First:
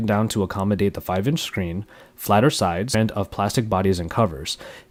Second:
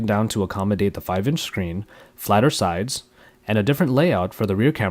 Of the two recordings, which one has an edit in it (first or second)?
second